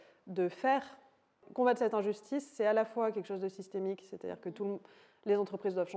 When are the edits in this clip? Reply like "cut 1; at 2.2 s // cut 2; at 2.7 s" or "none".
cut 1; at 1.5 s